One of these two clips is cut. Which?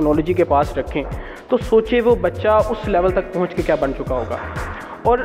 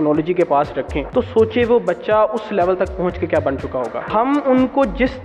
second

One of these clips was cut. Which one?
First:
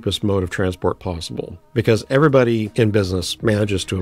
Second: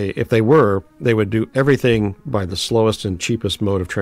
first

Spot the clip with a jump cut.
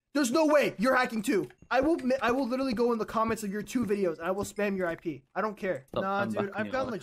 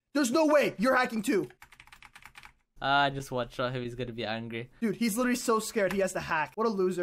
first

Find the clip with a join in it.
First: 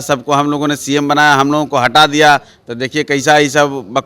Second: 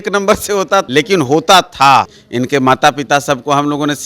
second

